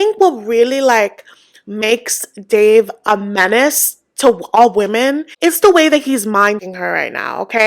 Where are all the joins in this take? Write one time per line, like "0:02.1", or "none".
0:06.6